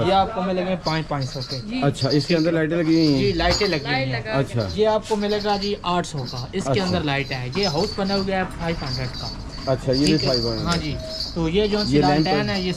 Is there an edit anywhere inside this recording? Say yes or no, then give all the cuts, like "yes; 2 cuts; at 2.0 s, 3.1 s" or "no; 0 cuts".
no; 0 cuts